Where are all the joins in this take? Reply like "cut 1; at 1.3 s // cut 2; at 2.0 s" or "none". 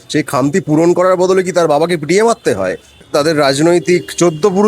cut 1; at 3.0 s